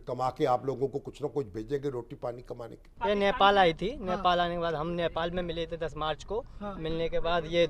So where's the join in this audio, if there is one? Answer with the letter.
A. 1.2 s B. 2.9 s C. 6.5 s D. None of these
B